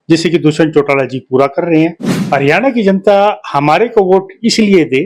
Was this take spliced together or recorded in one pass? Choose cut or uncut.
cut